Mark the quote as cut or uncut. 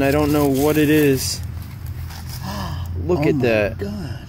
uncut